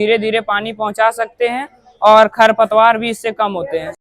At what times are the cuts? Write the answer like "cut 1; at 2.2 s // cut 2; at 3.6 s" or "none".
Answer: none